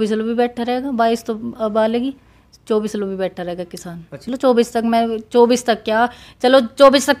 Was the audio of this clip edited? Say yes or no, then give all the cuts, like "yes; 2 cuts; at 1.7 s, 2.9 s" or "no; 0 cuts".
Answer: yes; 1 cut; at 4.2 s